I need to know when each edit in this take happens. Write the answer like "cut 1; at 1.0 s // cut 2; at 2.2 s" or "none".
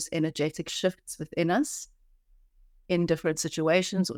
none